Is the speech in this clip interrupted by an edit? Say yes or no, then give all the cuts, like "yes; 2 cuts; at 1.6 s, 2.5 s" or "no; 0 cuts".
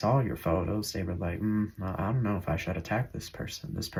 no; 0 cuts